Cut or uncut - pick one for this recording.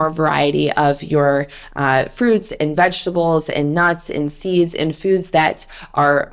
uncut